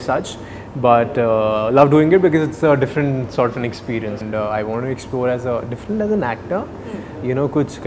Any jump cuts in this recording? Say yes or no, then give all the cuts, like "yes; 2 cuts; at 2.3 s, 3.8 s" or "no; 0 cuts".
yes; 1 cut; at 4.2 s